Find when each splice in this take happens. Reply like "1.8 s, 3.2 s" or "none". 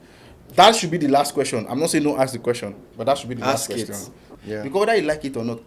4.3 s